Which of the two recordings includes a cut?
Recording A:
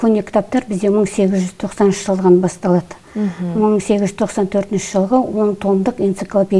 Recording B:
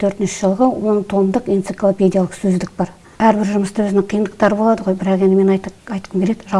B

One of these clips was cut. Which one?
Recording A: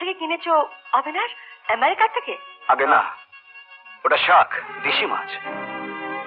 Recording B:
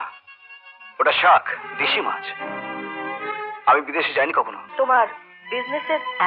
B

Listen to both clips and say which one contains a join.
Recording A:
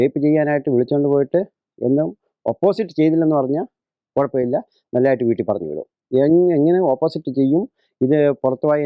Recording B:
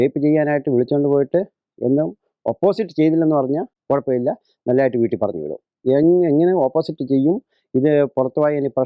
B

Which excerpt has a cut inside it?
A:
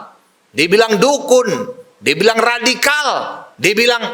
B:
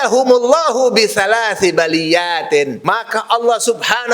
B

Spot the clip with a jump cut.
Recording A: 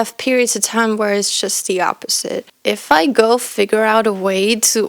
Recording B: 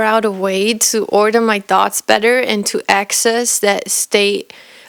A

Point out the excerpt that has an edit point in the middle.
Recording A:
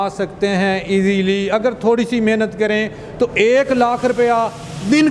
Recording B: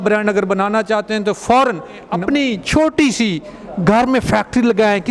B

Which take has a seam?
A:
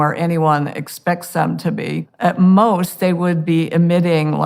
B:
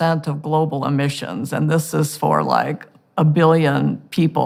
A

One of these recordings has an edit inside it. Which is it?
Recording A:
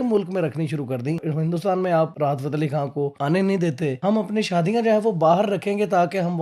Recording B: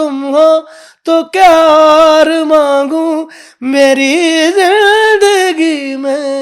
A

